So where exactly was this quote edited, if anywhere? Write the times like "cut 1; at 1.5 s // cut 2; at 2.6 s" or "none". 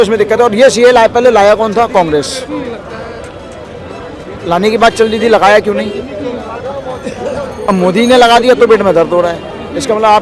none